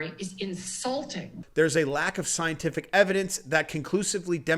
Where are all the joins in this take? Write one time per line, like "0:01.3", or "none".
0:01.4